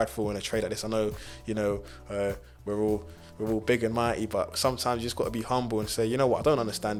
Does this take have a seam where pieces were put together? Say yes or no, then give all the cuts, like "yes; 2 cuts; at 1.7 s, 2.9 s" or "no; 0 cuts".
no; 0 cuts